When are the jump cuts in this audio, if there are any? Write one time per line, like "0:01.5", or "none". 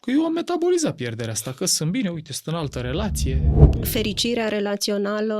0:03.5